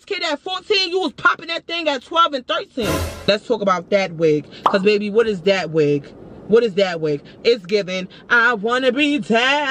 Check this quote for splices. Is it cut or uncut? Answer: cut